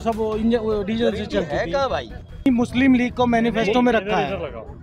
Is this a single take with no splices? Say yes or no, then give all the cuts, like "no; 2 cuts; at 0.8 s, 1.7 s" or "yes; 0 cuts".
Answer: no; 1 cut; at 2.5 s